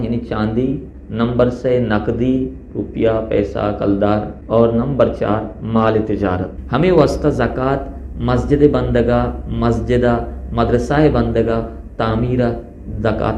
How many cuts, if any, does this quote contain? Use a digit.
3